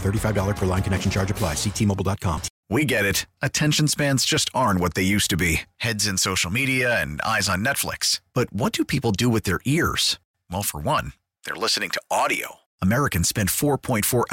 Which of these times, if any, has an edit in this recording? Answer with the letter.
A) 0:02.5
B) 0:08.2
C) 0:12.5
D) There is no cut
A